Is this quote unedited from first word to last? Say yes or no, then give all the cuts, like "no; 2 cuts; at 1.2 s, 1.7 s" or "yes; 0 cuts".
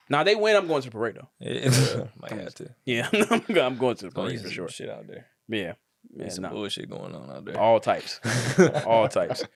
yes; 0 cuts